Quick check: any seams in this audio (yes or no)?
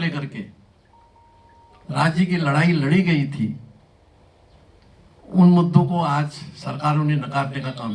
no